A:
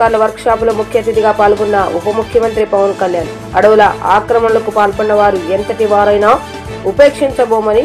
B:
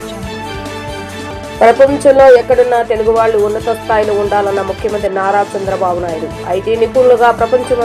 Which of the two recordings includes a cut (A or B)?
B